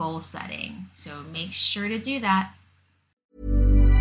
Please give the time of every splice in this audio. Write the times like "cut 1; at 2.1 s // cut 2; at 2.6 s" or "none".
cut 1; at 3.0 s